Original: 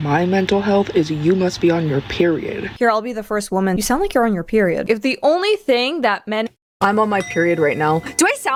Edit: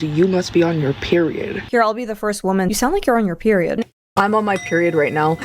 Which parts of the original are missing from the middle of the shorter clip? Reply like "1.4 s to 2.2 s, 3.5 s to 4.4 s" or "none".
4.8 s to 6.4 s